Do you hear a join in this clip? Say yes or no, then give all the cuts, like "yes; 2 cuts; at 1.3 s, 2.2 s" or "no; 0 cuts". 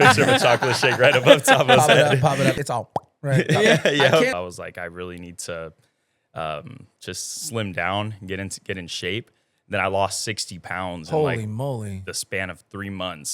yes; 2 cuts; at 2.6 s, 4.3 s